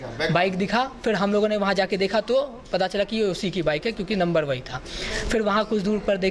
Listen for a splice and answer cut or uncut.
uncut